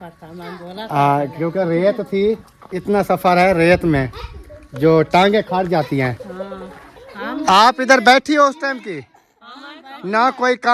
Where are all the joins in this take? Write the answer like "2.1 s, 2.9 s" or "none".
none